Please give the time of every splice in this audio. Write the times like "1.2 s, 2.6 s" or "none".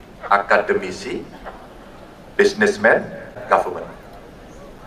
3.4 s

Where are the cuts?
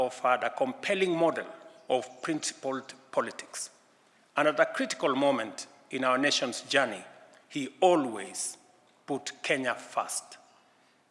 none

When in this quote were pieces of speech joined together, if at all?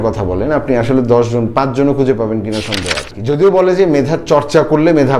3.1 s

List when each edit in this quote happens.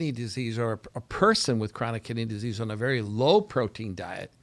none

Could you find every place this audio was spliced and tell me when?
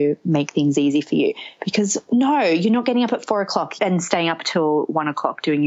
3.8 s

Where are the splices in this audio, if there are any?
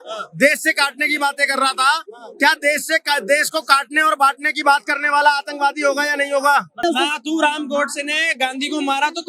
6.8 s

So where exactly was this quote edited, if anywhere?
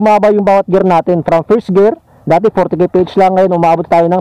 none

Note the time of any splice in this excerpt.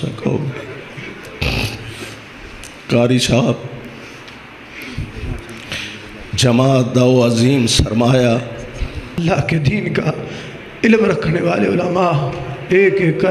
9.2 s

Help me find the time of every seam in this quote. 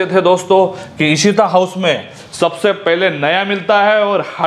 none

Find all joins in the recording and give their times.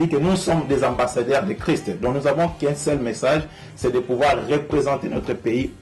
none

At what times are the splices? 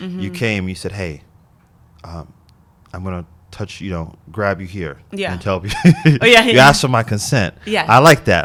none

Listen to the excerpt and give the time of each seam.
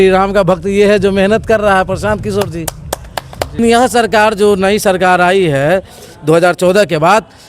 3.6 s

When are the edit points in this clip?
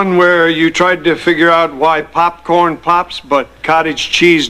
0.9 s

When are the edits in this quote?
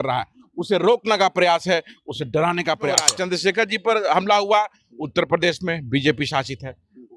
3.1 s

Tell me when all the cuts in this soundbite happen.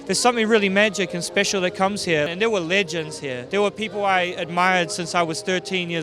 2.3 s, 3.3 s

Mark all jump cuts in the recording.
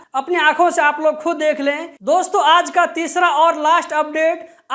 1.9 s

